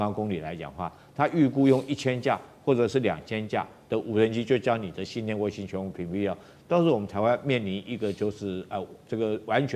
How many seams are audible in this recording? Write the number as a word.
zero